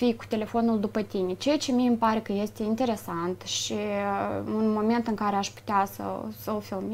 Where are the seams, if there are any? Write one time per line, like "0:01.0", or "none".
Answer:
none